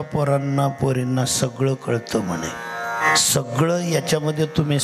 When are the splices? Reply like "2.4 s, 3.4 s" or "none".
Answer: 3.1 s